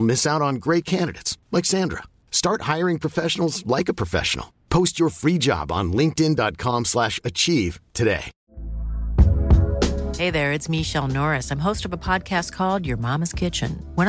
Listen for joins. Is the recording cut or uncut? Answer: uncut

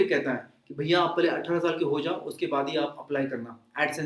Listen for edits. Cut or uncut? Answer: uncut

